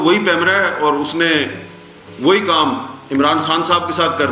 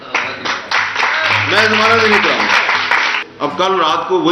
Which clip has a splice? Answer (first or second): second